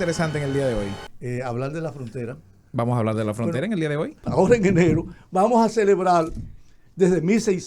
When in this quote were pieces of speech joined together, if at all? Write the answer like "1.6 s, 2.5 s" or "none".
1.1 s, 4.2 s